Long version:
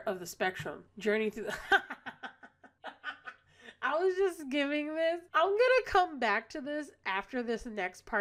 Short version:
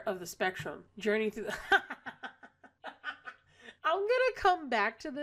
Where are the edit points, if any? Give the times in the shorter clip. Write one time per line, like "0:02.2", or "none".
0:03.7